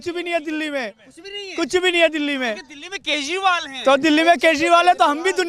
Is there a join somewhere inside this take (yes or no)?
no